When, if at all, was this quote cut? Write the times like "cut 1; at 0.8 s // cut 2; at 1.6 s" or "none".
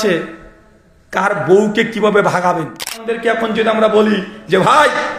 cut 1; at 3.2 s